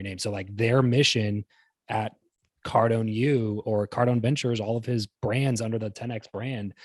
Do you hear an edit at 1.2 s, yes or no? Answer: no